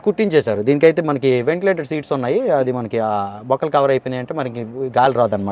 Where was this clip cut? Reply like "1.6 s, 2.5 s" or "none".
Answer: none